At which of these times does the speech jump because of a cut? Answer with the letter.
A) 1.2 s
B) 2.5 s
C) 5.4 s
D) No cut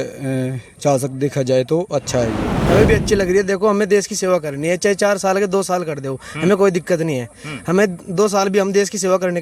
B